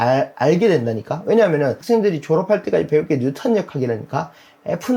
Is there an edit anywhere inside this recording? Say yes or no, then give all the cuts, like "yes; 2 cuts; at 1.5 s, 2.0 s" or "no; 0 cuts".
yes; 1 cut; at 1.8 s